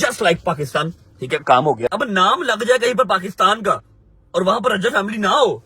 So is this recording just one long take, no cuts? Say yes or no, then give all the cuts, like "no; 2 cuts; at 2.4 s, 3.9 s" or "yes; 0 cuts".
no; 1 cut; at 1.9 s